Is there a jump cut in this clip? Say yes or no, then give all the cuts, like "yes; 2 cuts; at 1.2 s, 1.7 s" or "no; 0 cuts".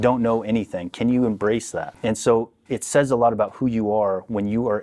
yes; 1 cut; at 1.8 s